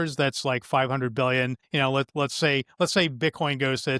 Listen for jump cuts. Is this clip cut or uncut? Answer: cut